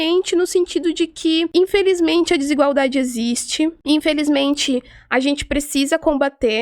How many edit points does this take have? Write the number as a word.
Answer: two